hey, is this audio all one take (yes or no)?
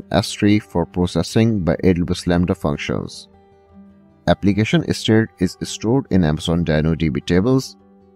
yes